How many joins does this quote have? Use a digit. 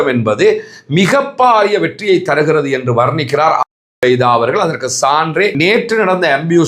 1